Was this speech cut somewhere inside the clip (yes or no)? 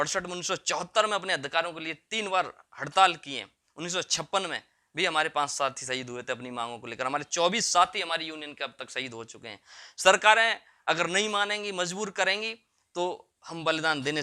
no